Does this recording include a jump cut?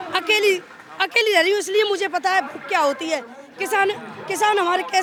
no; 0 cuts

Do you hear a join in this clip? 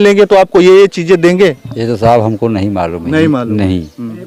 no; 0 cuts

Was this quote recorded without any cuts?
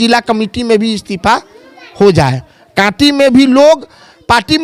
yes; 0 cuts

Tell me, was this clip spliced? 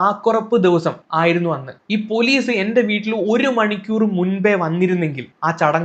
no; 0 cuts

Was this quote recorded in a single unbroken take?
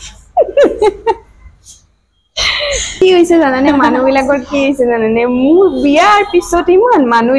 no; 1 cut; at 3.0 s

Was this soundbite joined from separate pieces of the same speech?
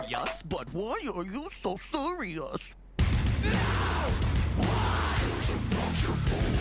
yes; 1 cut; at 2.7 s

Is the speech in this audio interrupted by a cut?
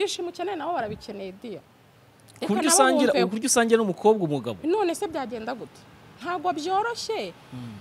no; 0 cuts

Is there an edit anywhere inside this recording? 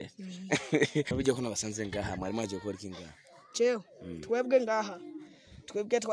yes; 1 cut; at 1.1 s

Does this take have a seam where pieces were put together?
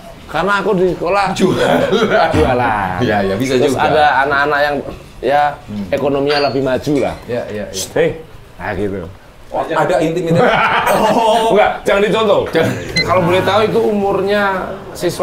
yes; 1 cut; at 12.9 s

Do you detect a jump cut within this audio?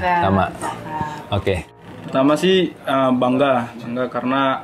yes; 1 cut; at 1.7 s

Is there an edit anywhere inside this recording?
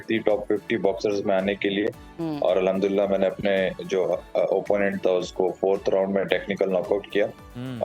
no; 0 cuts

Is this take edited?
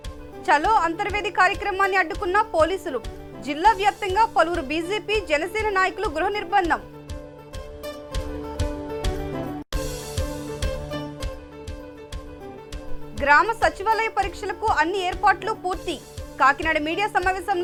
no; 0 cuts

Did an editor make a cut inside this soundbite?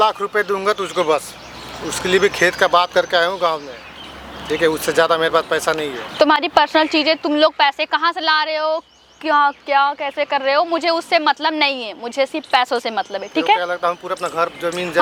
no; 0 cuts

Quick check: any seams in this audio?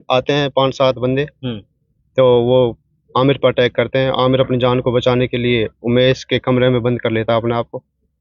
no; 0 cuts

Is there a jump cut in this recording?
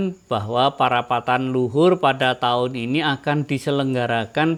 no; 0 cuts

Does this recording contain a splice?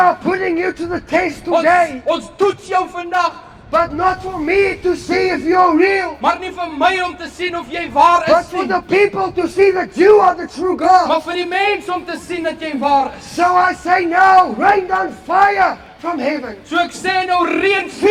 no; 0 cuts

